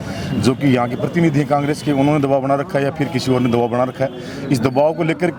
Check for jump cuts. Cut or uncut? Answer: uncut